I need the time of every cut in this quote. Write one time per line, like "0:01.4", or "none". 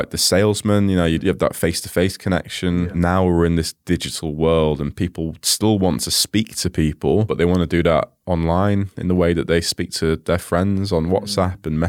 0:01.2
0:02.8
0:07.3